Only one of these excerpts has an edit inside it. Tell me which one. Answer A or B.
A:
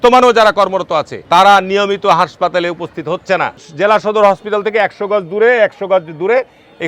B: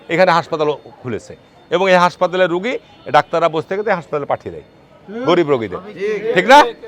A